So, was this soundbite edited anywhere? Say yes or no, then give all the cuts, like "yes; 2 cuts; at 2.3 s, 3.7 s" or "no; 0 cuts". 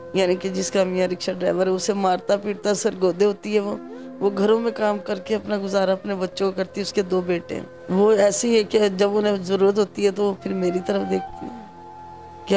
yes; 1 cut; at 7.7 s